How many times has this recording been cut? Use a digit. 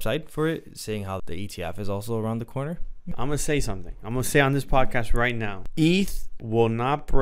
3